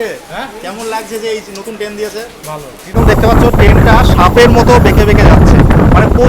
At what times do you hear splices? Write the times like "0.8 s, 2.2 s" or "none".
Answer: 2.8 s